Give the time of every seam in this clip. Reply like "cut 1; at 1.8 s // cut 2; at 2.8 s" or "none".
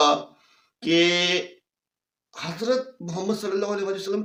none